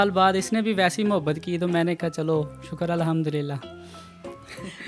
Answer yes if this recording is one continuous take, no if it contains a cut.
yes